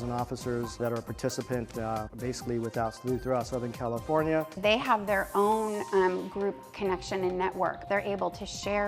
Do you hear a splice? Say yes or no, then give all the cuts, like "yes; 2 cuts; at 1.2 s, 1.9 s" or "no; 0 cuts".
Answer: yes; 4 cuts; at 0.8 s, 2.1 s, 4.5 s, 7.8 s